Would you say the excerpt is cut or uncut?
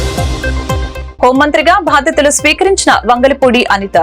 uncut